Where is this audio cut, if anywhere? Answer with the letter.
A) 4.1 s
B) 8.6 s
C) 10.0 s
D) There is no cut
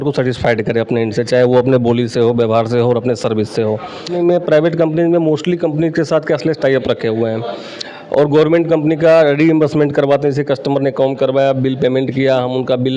A